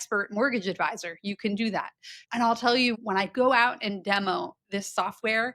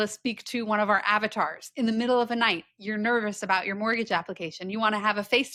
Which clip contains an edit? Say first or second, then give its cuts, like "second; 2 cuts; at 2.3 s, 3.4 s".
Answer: first; 2 cuts; at 2.2 s, 3.0 s